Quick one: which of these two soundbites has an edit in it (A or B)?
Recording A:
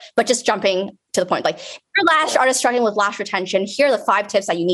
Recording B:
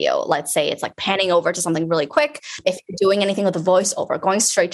B